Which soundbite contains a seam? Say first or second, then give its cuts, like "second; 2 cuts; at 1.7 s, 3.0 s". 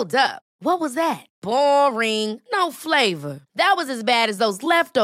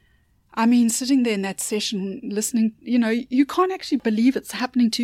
second; 1 cut; at 4.0 s